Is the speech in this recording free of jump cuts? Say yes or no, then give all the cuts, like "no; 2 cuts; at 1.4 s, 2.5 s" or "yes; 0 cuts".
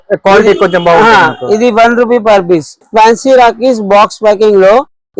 no; 1 cut; at 2.9 s